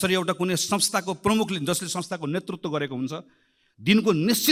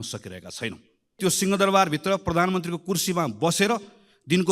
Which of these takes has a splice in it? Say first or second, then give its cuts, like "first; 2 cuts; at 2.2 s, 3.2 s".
second; 1 cut; at 1.1 s